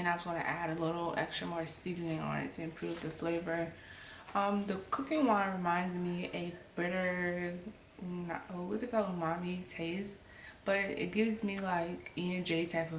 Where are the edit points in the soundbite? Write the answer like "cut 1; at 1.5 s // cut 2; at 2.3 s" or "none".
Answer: none